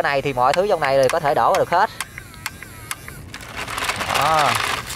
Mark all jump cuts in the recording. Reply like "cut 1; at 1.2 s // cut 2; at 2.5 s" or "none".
none